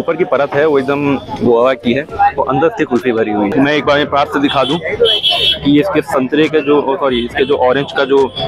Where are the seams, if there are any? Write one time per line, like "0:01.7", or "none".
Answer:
0:03.5

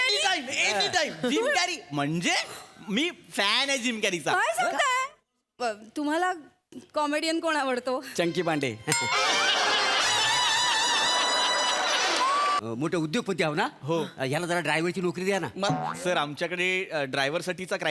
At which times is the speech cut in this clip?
0:12.6

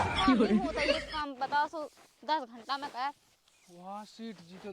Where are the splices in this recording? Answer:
0:01.0

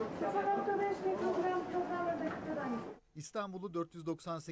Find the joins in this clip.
0:03.0

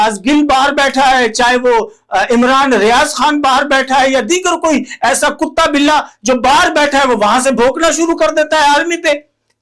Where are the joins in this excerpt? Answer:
none

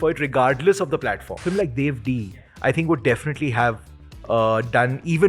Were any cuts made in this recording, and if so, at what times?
0:01.4

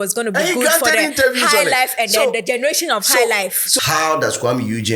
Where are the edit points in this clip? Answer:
0:03.6

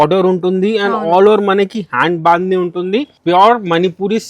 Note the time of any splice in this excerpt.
0:03.1

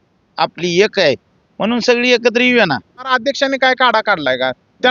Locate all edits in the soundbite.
0:03.1

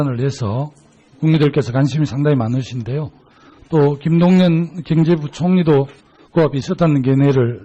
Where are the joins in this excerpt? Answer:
0:06.6

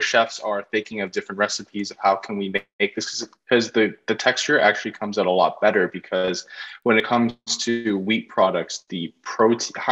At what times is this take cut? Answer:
0:07.1

